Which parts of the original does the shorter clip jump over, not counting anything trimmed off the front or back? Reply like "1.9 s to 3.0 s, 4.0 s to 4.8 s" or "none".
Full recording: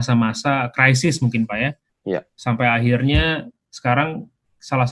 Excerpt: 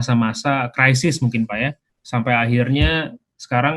2.0 s to 2.3 s

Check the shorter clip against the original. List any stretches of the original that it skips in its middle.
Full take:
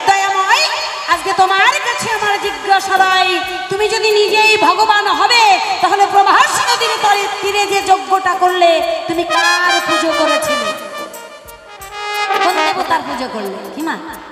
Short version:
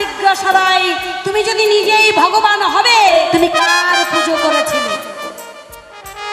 5.6 s to 8.9 s

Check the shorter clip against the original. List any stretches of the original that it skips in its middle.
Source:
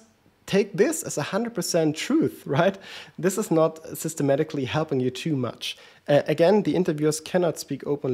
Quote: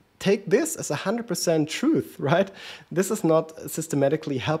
none

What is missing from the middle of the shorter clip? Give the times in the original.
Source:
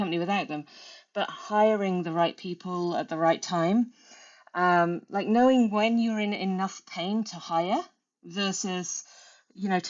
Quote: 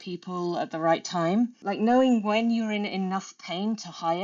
4.0 s to 5.1 s

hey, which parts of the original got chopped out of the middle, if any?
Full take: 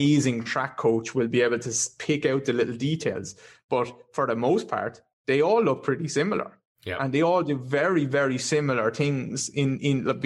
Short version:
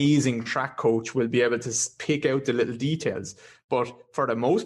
none

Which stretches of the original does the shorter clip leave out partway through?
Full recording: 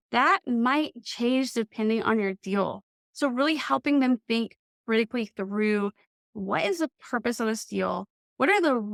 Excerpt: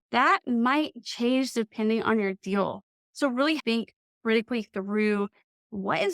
3.6 s to 4.2 s

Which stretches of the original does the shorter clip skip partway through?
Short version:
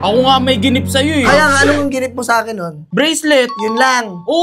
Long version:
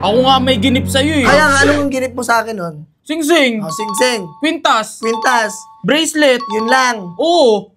2.8 s to 5.7 s

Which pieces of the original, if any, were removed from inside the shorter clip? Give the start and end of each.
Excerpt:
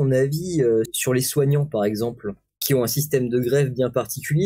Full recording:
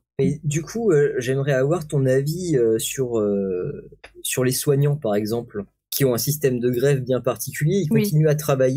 2.9 s to 4.2 s

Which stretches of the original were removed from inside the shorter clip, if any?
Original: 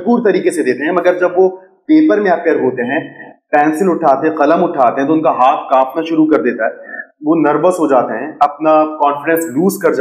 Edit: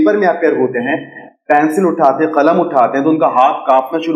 none

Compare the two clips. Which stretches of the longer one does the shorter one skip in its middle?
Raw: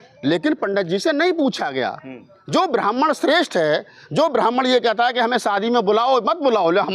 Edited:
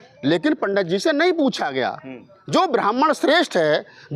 none

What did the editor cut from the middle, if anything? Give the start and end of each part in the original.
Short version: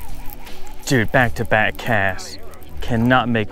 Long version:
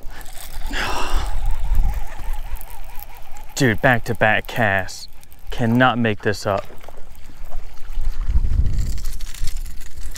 none

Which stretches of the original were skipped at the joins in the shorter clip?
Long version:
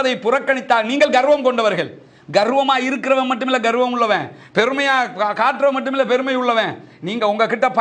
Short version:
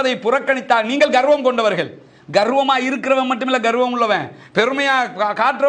none

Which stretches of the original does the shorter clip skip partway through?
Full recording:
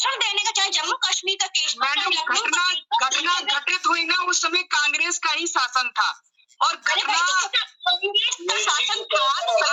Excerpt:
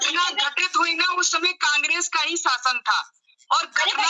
none

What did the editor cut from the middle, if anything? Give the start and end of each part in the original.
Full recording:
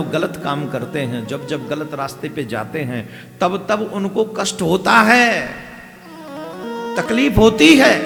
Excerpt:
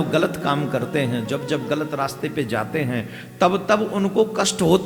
none

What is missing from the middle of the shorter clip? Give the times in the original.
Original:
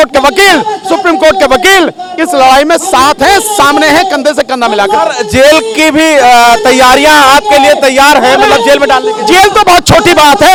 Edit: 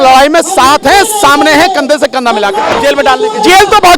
5.1 s to 8.6 s

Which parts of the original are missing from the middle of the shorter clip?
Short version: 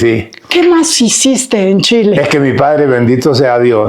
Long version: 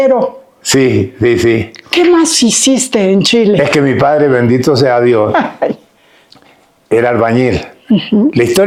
none

